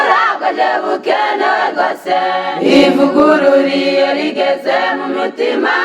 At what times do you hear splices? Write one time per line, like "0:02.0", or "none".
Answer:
0:02.4